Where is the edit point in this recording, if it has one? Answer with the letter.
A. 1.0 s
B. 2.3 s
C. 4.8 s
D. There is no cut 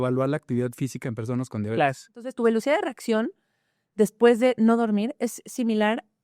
B